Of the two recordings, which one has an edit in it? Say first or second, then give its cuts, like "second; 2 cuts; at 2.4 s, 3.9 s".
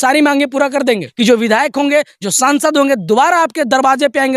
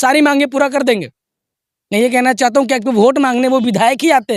first; 1 cut; at 1.1 s